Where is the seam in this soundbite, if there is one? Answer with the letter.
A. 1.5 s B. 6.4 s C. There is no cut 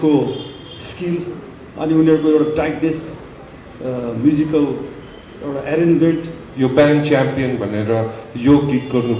B